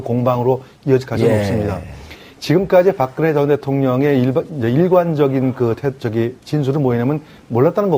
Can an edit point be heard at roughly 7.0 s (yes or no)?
yes